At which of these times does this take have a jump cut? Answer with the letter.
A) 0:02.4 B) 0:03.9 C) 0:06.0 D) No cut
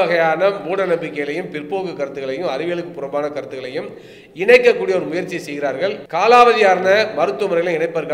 C